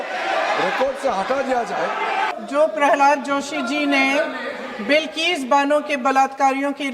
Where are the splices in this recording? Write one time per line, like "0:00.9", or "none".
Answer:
0:02.3